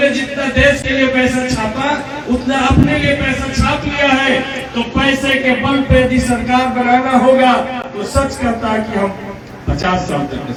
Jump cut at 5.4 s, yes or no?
no